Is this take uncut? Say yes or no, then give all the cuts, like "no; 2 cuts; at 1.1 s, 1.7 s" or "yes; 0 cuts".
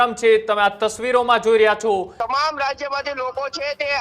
no; 1 cut; at 2.2 s